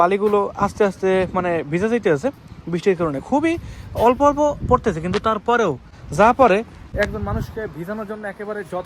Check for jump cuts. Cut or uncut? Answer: uncut